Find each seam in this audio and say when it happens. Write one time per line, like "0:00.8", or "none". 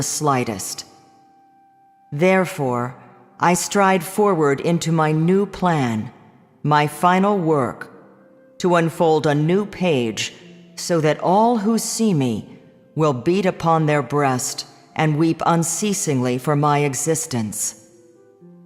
0:14.5